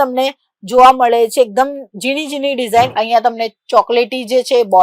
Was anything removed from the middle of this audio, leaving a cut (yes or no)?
yes